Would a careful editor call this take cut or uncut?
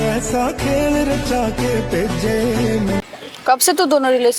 cut